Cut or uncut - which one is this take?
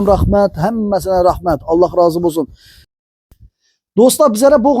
cut